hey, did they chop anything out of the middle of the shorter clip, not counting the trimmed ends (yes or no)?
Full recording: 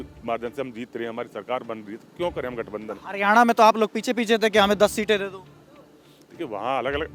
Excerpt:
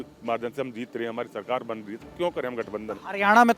no